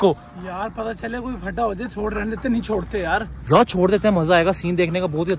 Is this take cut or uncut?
uncut